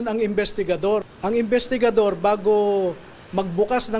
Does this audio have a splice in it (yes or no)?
yes